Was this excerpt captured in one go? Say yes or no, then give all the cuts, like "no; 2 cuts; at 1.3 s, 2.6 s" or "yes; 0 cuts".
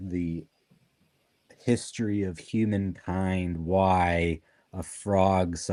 yes; 0 cuts